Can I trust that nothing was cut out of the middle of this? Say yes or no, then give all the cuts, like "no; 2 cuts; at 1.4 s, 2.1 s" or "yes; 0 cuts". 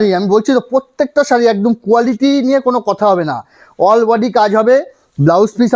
yes; 0 cuts